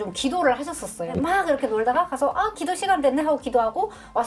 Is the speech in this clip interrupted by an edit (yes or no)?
yes